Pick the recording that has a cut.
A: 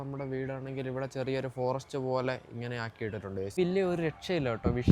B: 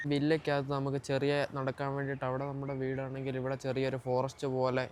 A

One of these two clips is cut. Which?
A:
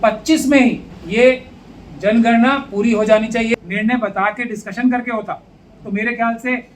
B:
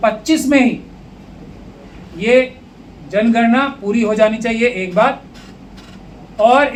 A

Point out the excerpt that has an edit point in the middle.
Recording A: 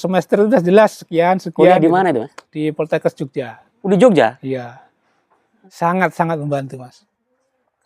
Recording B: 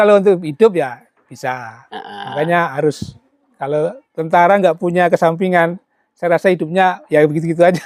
A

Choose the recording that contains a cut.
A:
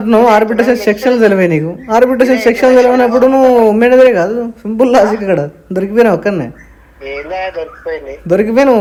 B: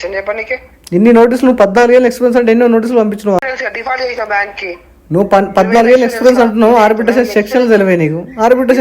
B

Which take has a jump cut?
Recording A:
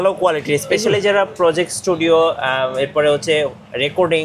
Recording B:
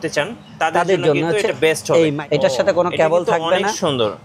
B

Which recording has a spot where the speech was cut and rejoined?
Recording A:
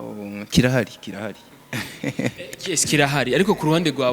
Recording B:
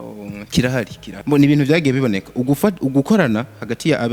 B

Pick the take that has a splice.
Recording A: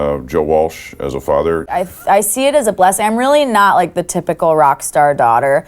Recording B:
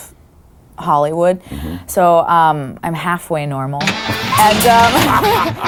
A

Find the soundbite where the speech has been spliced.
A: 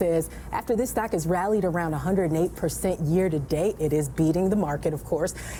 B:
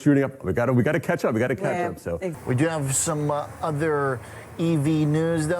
B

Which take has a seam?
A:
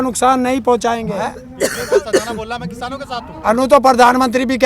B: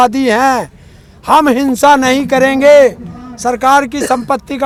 A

